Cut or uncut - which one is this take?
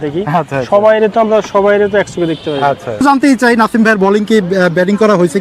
cut